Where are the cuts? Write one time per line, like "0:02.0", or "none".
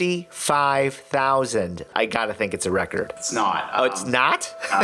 0:01.9
0:03.2